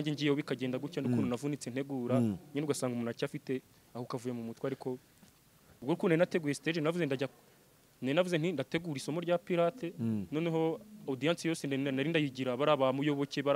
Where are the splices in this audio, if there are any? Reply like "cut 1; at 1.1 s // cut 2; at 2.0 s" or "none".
cut 1; at 5.8 s

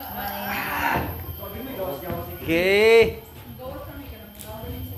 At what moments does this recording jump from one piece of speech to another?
none

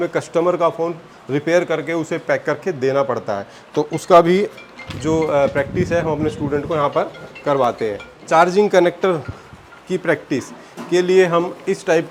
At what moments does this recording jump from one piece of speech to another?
none

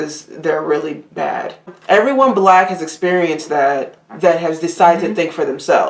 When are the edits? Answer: cut 1; at 1.7 s

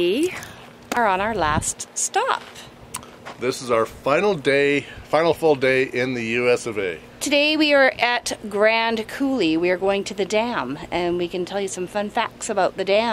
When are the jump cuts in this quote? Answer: cut 1; at 1.0 s // cut 2; at 7.2 s

